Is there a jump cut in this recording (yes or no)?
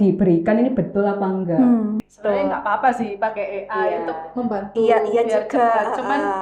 yes